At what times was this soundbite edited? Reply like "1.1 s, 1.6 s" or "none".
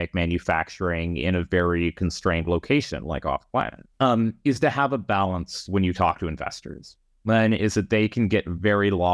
3.8 s